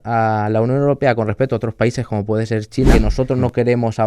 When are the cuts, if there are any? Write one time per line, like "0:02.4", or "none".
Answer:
0:02.9